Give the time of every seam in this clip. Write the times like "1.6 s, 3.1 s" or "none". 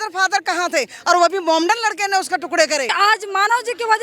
2.9 s